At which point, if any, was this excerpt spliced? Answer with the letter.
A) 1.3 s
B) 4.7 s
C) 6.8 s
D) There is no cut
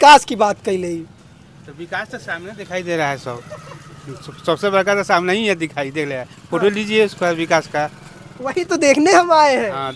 D